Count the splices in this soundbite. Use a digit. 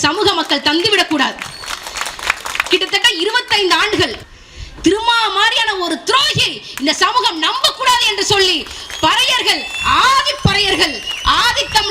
1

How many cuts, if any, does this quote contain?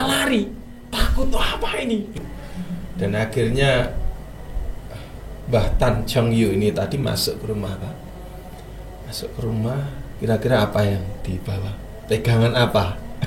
1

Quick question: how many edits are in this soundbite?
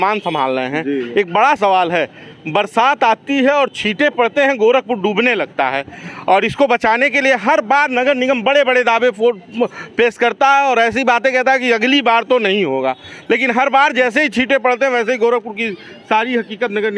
0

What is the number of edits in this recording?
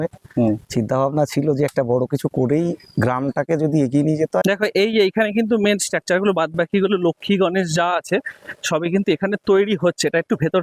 1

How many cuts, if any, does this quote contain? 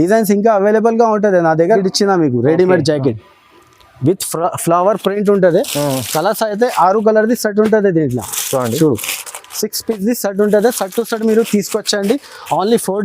1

